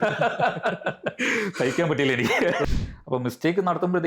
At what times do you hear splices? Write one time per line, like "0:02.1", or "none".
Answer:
0:02.6